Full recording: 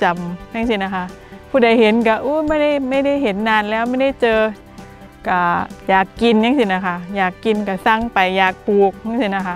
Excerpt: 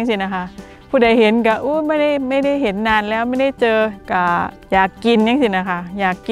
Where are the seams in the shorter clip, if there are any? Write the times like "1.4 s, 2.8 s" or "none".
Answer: 4.0 s